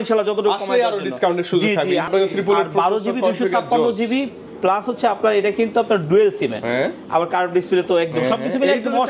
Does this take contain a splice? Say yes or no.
yes